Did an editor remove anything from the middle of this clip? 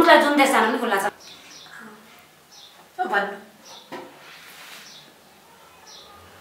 yes; 1 cut; at 1.1 s

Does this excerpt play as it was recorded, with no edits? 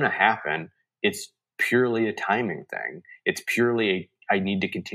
yes; 0 cuts

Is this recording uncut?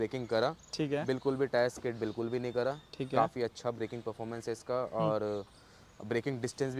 yes; 0 cuts

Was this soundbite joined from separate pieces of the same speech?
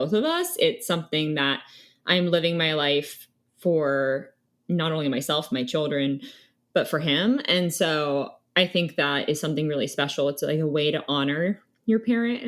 no; 0 cuts

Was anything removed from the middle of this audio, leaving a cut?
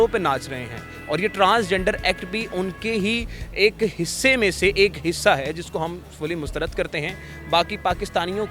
no; 0 cuts

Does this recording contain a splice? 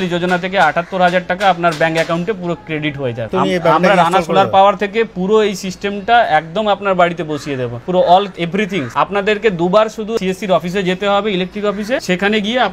no; 0 cuts

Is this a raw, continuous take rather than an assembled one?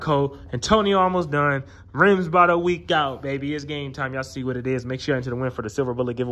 yes; 0 cuts

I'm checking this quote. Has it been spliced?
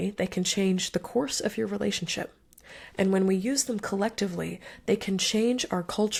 no; 0 cuts

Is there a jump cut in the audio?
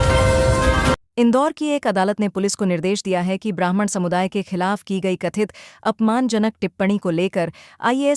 yes; 1 cut; at 1.1 s

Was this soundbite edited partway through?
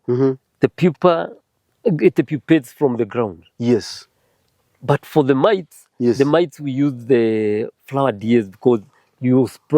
no; 0 cuts

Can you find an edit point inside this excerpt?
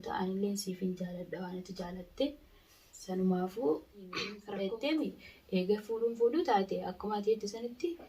yes; 1 cut; at 4.3 s

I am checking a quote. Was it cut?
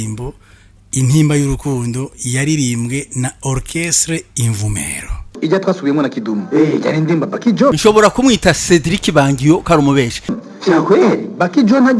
yes; 3 cuts; at 5.3 s, 7.8 s, 10.4 s

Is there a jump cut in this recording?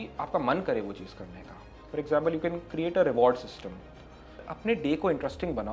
yes; 1 cut; at 4.4 s

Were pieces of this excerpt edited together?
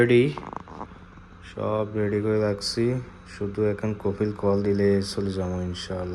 no; 0 cuts

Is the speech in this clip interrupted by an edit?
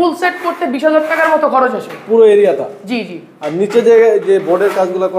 no; 0 cuts

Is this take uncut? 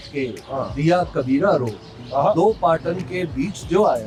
yes; 0 cuts

